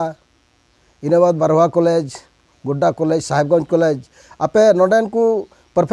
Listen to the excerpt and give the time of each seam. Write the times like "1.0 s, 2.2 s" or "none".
none